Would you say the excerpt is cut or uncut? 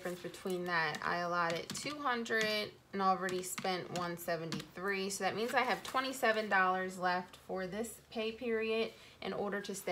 uncut